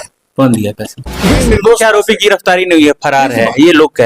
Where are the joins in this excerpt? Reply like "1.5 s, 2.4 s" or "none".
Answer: 1.4 s